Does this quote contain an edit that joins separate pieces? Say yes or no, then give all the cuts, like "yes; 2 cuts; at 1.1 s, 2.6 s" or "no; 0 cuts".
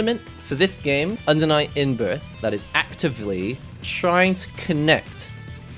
yes; 2 cuts; at 1.2 s, 2.3 s